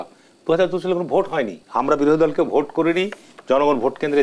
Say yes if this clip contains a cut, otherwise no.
yes